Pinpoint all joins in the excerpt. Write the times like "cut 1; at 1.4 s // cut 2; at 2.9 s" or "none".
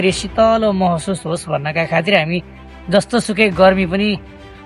none